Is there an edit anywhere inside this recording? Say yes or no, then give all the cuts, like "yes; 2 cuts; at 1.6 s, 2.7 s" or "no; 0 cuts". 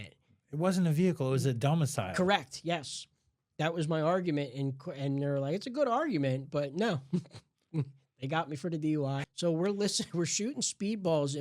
yes; 1 cut; at 9.2 s